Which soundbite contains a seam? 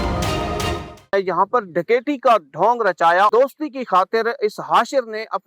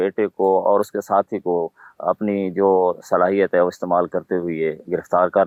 first; 2 cuts; at 1.1 s, 3.3 s

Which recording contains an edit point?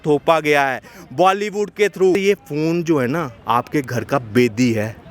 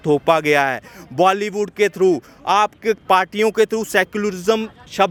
first; 1 cut; at 2.1 s

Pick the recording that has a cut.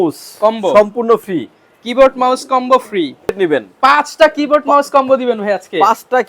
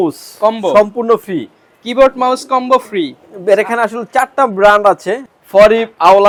first; 1 cut; at 3.3 s

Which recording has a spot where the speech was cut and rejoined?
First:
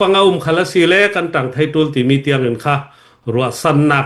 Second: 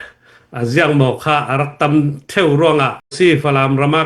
second; 1 cut; at 3.1 s

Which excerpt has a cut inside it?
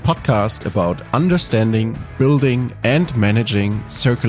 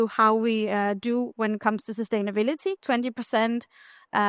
second; 1 cut; at 2.8 s

